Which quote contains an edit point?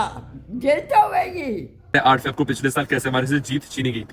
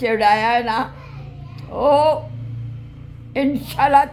first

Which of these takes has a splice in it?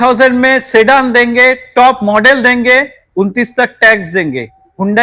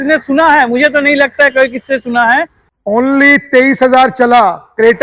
second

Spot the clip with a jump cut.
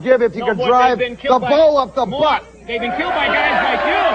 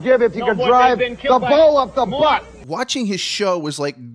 second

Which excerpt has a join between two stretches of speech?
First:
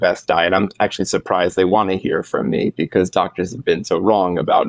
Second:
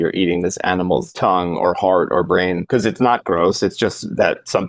second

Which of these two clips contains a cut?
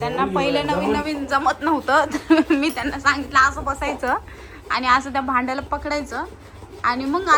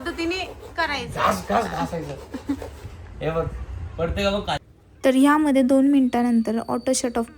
second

